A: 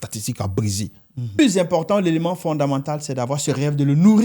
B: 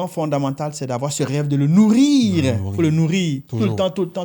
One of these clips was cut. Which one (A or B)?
A